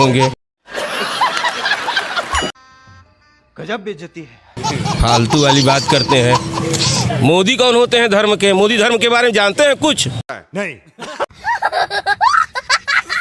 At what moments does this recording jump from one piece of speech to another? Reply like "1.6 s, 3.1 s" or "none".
none